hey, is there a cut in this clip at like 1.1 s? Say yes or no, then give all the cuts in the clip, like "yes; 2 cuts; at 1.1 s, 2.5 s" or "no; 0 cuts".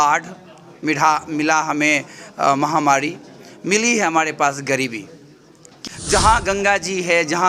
no; 1 cut; at 5.7 s